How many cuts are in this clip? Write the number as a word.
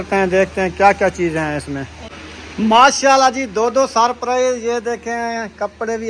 one